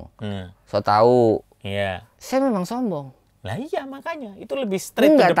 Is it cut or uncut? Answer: uncut